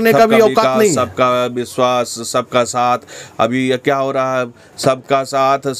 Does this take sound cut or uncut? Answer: cut